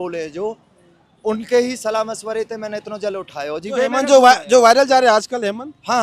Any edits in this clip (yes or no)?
no